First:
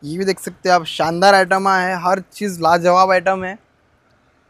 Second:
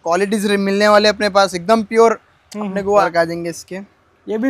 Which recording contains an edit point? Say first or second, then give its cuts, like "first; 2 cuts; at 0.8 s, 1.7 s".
second; 1 cut; at 3.0 s